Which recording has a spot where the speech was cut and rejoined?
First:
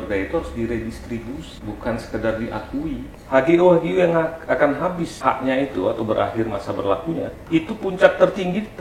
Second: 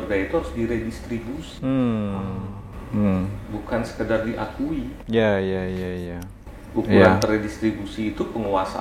first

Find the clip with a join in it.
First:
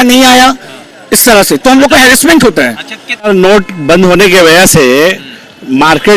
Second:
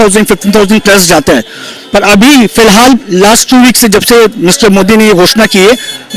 first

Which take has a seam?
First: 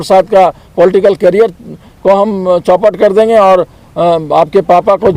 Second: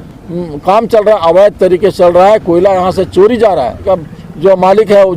second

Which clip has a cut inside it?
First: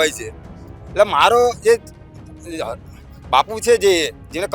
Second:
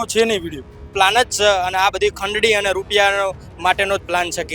second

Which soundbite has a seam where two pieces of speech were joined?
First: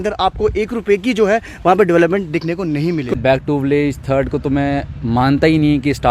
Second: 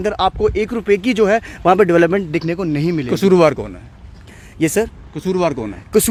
first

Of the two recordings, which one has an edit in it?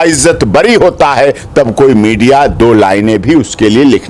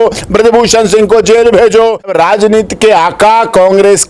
second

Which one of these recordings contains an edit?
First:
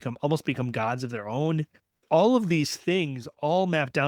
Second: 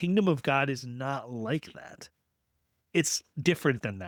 first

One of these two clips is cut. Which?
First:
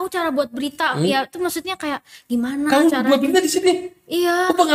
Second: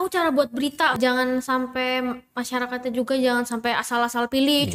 second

